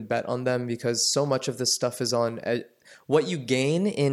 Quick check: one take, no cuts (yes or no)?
yes